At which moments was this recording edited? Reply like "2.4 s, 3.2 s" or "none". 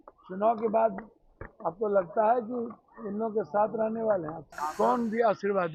4.4 s